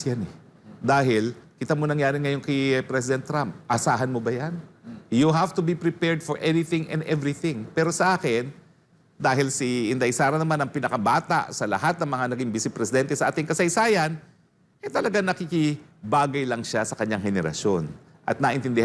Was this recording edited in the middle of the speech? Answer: no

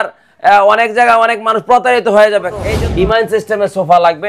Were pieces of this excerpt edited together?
yes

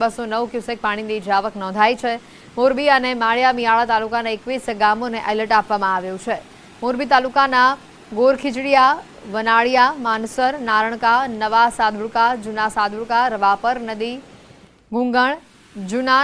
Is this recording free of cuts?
yes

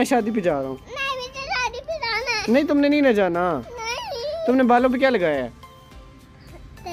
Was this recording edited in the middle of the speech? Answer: no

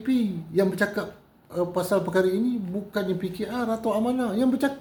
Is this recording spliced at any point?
no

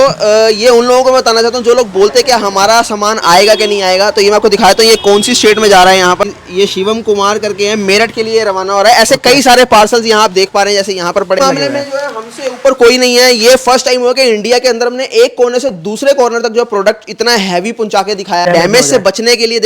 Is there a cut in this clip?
yes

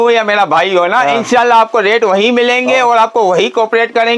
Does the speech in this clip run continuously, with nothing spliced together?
yes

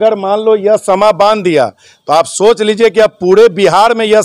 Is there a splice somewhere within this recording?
no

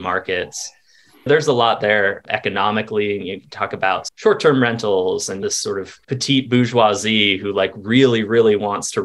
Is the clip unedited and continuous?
no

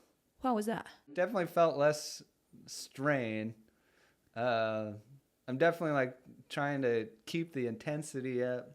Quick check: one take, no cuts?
yes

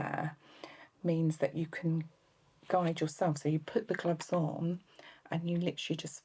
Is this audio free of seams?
yes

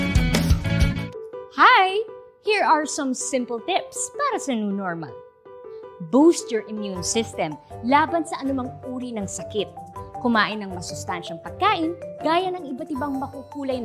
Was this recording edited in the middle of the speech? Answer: yes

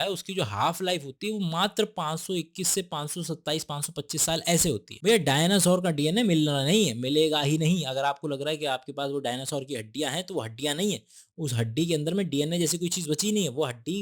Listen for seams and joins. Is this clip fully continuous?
no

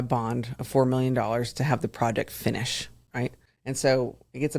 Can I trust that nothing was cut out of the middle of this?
no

